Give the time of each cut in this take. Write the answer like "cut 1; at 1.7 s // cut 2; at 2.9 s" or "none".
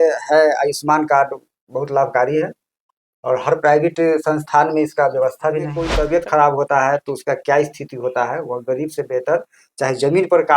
cut 1; at 5.8 s